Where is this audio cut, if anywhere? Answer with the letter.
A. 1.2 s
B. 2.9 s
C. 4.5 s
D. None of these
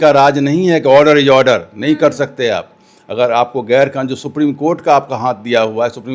D